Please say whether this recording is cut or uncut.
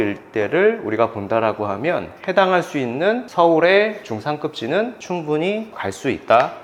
uncut